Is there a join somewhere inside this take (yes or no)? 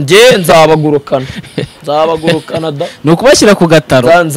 no